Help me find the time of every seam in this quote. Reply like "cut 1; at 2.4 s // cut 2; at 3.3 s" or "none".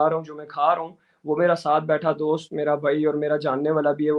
none